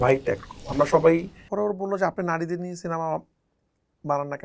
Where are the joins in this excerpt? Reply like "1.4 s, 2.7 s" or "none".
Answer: 1.4 s